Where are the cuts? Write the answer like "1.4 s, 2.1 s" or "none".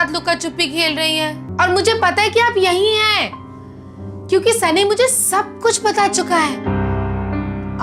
1.4 s

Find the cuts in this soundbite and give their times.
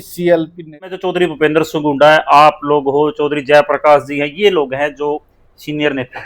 0.9 s

